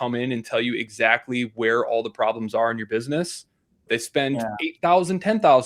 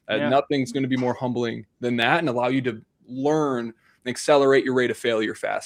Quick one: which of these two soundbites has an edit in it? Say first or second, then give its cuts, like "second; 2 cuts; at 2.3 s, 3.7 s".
first; 1 cut; at 3.9 s